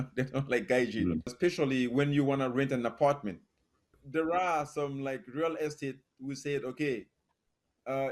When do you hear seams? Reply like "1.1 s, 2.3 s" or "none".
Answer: 1.3 s, 3.9 s